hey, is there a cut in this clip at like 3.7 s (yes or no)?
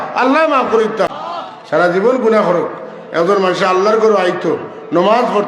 no